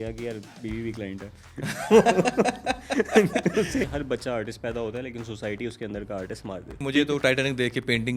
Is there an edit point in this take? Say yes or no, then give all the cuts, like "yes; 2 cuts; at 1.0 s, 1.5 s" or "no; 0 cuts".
yes; 2 cuts; at 3.9 s, 6.8 s